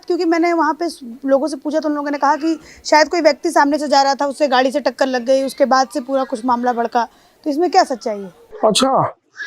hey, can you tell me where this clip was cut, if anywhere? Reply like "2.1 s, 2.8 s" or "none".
none